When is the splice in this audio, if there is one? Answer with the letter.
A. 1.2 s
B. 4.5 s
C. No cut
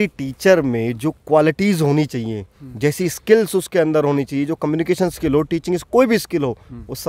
C